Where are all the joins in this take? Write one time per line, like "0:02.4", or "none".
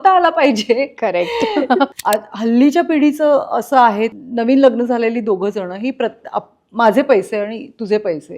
0:01.9
0:04.2